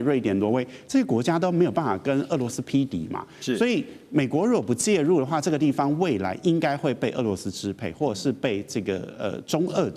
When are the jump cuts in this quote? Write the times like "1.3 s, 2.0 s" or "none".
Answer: none